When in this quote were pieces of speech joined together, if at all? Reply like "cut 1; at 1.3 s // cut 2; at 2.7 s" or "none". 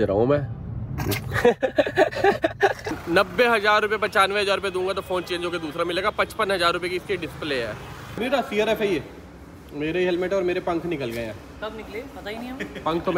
cut 1; at 2.9 s // cut 2; at 8.2 s